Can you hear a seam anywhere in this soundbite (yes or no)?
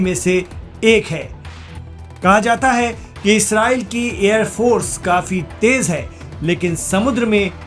yes